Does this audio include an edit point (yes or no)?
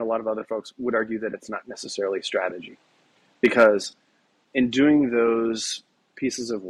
yes